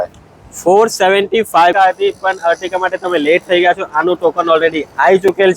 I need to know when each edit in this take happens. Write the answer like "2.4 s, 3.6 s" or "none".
1.7 s